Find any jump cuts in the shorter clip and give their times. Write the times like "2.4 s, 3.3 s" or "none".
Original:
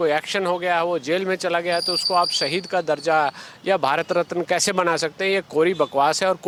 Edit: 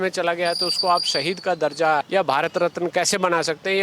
2.1 s